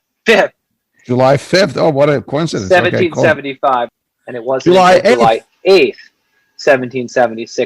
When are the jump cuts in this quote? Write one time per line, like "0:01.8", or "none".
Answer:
0:03.9